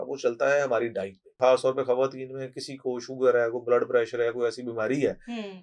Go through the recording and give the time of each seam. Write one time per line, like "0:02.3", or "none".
0:01.2